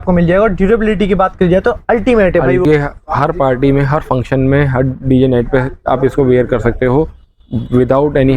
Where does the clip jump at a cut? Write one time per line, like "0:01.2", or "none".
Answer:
0:02.6